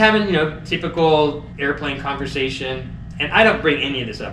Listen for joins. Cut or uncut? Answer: uncut